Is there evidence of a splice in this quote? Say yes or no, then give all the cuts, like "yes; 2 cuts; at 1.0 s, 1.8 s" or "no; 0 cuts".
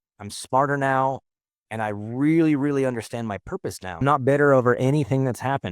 yes; 1 cut; at 4.0 s